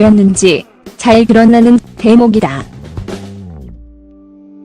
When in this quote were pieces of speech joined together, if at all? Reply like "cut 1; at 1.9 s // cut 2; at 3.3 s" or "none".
cut 1; at 3.7 s